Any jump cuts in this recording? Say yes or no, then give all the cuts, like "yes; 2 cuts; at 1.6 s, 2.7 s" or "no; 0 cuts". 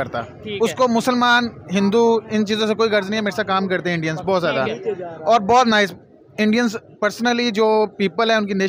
no; 0 cuts